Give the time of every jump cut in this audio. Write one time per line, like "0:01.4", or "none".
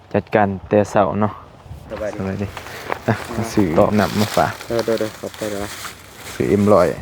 0:01.9